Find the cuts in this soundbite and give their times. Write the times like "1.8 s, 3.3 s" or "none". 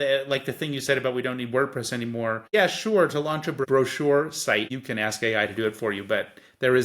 2.4 s, 3.6 s, 4.7 s